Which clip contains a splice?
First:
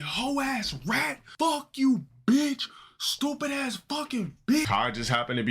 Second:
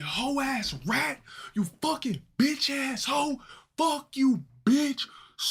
first; 2 cuts; at 1.2 s, 4.7 s

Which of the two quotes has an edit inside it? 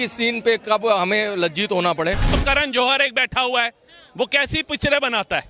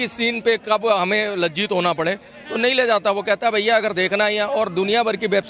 first; 1 cut; at 2.4 s

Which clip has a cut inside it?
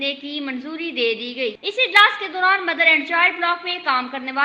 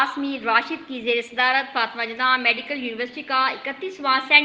first; 1 cut; at 1.6 s

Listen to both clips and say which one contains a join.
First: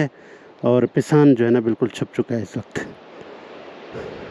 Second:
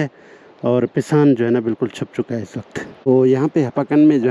second; 1 cut; at 3.1 s

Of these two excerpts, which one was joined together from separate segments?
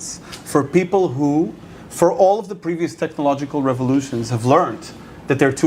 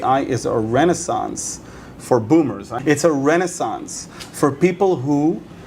second; 1 cut; at 2.8 s

